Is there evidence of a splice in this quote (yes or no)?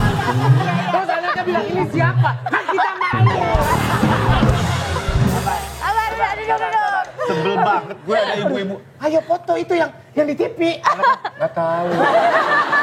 yes